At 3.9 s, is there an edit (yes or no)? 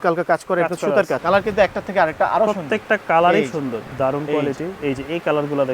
yes